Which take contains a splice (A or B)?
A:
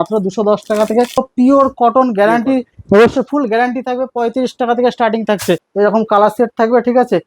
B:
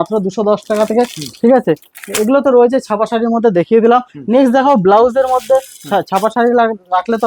A